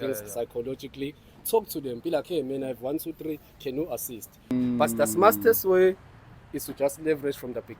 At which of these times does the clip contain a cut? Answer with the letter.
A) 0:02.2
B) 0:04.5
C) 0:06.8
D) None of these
B